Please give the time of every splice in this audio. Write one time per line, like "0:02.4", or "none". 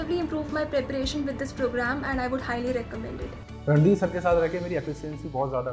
none